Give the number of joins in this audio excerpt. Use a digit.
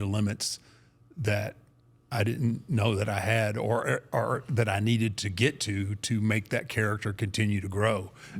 0